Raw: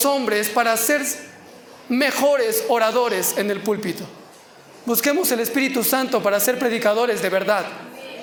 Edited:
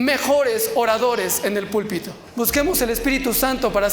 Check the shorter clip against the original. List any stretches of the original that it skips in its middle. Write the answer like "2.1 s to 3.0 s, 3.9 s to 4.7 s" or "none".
4.1 s to 4.7 s